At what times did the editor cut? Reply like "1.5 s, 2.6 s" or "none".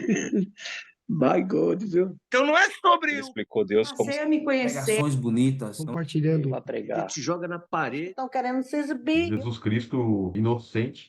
2.2 s

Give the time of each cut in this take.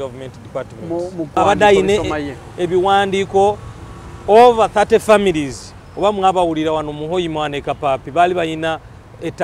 1.4 s

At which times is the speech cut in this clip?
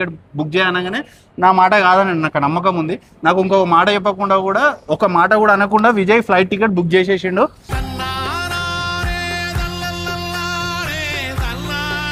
none

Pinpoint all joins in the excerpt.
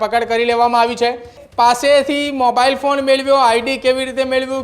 1.4 s

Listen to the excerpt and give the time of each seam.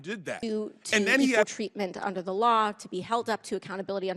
1.4 s

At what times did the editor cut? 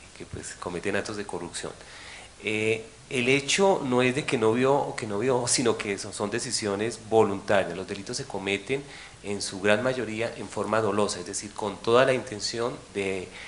8.8 s

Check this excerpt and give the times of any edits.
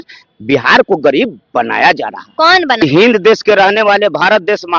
2.8 s

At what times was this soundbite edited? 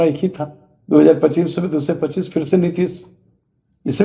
none

